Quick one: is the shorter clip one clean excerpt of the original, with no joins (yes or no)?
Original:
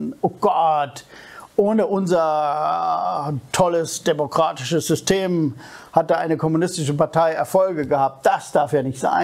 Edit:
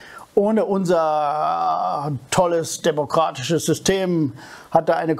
yes